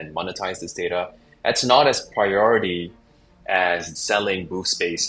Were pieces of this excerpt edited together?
yes; 1 cut; at 3.9 s

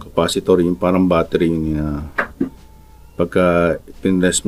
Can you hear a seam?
no; 0 cuts

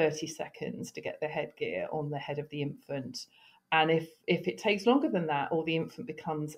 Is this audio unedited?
yes; 0 cuts

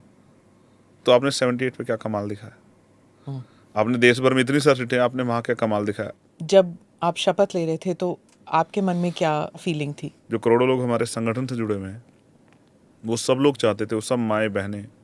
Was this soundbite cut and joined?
yes; 2 cuts; at 6.1 s, 9.6 s

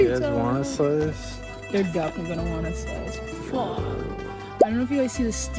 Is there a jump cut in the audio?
no; 0 cuts

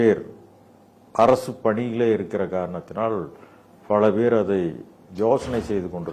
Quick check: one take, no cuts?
yes; 0 cuts

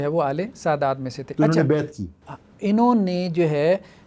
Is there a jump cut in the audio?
no; 0 cuts

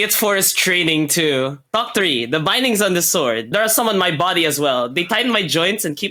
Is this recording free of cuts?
yes; 0 cuts

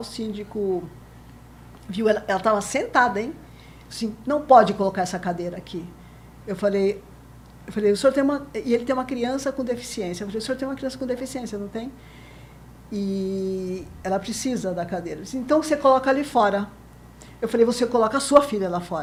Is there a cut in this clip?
no; 0 cuts

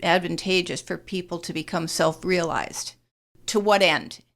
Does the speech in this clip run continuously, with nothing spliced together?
no; 1 cut; at 3.4 s

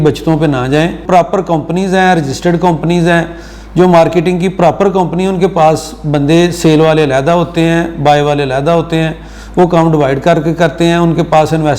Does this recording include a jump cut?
yes; 1 cut; at 1.0 s

